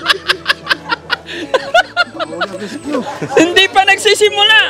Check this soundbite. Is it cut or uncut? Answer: uncut